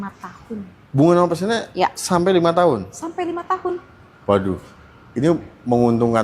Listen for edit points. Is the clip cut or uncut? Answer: uncut